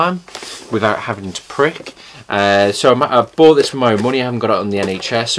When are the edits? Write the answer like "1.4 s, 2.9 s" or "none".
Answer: 3.1 s